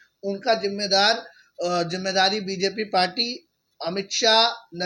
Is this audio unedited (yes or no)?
yes